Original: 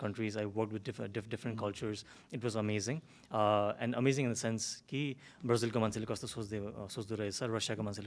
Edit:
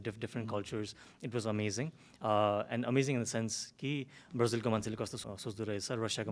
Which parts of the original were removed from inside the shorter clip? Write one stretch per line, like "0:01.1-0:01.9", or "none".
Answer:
0:06.3-0:06.7

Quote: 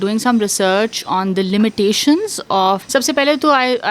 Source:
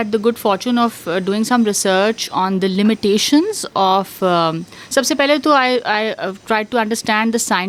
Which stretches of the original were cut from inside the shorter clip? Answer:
0:04.1-0:04.9

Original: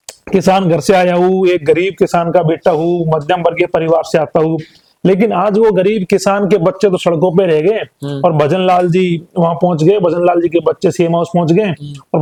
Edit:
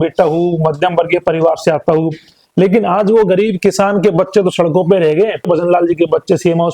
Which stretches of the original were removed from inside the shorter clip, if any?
0:07.9-0:10.0

